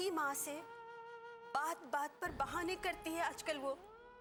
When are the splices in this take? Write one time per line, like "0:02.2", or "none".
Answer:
none